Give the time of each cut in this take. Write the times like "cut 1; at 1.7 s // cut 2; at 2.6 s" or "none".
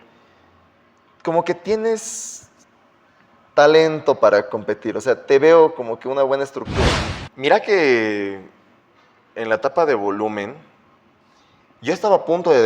cut 1; at 6.9 s

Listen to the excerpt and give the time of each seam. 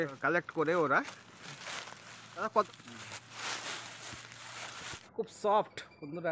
cut 1; at 2.7 s // cut 2; at 5.0 s

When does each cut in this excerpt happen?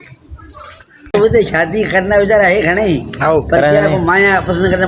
cut 1; at 1.1 s

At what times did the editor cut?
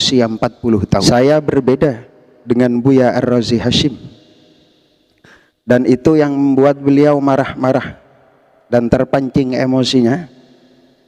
cut 1; at 1.0 s

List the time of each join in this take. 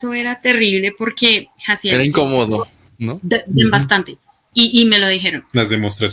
none

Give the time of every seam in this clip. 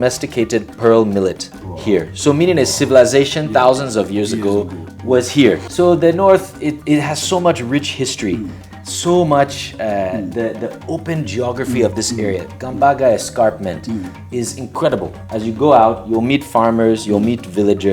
cut 1; at 5.7 s // cut 2; at 15.2 s

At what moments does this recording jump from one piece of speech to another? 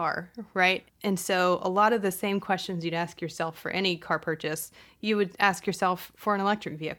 cut 1; at 0.8 s // cut 2; at 6.1 s

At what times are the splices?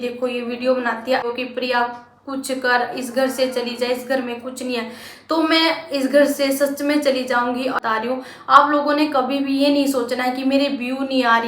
cut 1; at 1.2 s // cut 2; at 7.8 s

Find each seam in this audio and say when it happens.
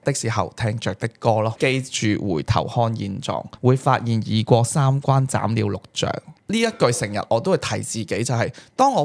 cut 1; at 1.6 s // cut 2; at 3.5 s

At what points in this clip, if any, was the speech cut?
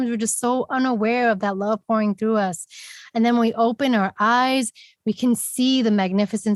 none

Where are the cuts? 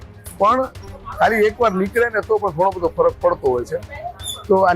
none

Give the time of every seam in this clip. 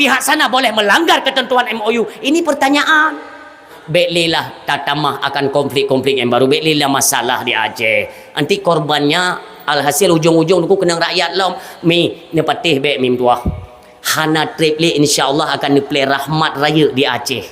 cut 1; at 3.7 s

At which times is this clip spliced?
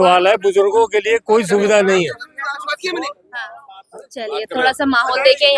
none

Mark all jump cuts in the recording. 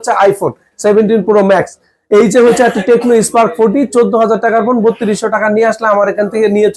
none

